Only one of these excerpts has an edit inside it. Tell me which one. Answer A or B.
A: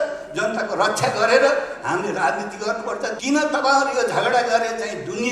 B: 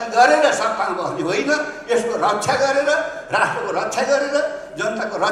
A